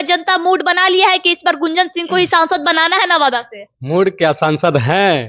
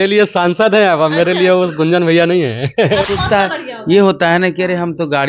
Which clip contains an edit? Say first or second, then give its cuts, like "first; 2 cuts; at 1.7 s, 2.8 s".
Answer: second; 1 cut; at 3.1 s